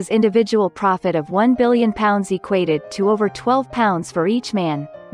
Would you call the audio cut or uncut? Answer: uncut